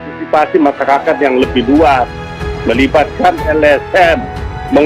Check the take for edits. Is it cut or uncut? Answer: uncut